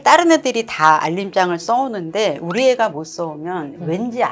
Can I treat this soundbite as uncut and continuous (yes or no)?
yes